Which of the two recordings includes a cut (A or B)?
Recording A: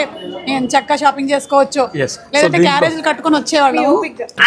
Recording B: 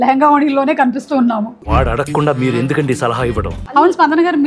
B